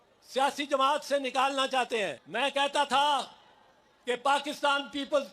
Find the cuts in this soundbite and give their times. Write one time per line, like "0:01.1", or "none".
0:02.2